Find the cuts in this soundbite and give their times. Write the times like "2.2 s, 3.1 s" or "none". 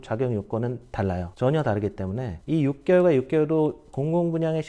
2.3 s